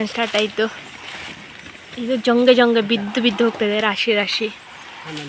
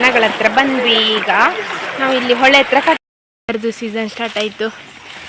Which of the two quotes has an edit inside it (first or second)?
second